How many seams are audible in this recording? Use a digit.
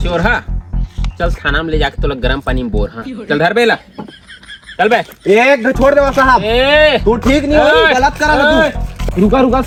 0